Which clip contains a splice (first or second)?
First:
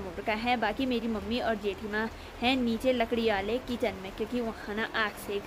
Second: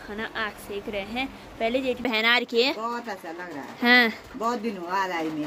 second